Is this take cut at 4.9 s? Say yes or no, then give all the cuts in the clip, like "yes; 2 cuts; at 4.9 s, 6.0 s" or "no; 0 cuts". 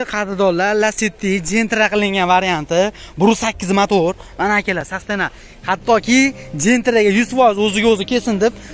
no; 0 cuts